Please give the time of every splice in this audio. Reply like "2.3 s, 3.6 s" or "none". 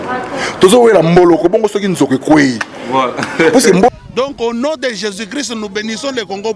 3.9 s